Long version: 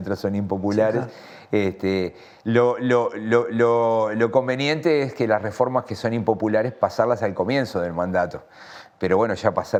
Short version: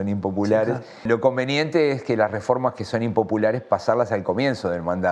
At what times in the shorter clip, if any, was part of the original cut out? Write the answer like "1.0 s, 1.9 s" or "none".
1.0 s